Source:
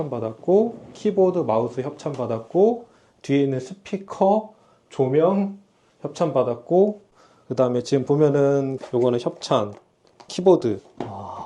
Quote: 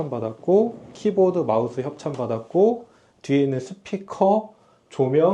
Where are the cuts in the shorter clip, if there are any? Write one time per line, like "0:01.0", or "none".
none